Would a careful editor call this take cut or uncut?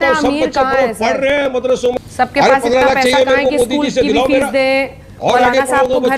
cut